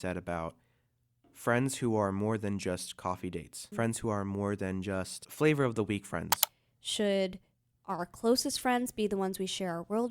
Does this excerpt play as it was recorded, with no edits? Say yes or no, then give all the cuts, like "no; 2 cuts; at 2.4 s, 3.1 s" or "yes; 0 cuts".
no; 3 cuts; at 3.6 s, 5.2 s, 6.5 s